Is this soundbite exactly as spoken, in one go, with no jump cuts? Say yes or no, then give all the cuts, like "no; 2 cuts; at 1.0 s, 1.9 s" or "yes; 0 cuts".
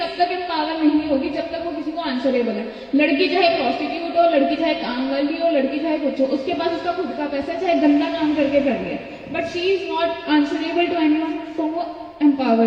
yes; 0 cuts